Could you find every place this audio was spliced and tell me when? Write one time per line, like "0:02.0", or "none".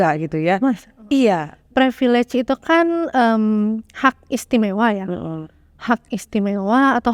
0:01.5